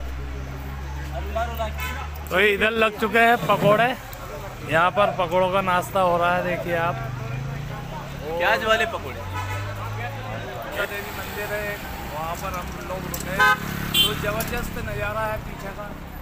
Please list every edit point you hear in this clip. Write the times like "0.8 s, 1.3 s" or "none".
10.8 s